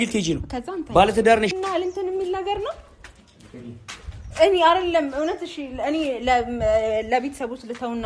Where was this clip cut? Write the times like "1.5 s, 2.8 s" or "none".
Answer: 1.5 s